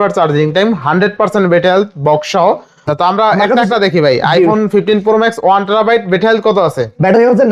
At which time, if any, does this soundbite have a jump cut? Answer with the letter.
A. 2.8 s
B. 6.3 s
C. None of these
A